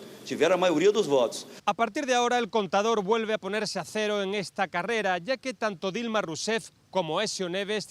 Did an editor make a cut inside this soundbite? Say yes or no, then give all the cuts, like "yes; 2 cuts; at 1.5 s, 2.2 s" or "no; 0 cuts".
yes; 1 cut; at 1.5 s